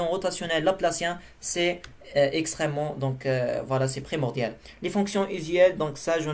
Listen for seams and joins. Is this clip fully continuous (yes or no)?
yes